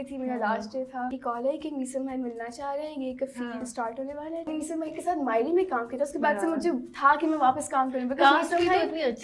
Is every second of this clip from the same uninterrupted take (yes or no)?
no